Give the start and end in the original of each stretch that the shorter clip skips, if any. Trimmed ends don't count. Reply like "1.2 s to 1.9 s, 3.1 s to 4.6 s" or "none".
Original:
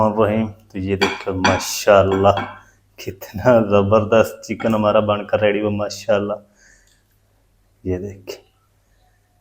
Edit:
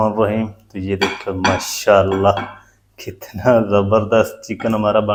none